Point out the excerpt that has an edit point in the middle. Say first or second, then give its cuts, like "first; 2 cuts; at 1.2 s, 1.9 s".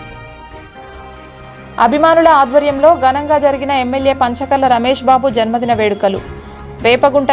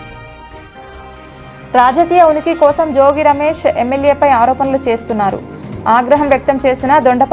first; 1 cut; at 1.7 s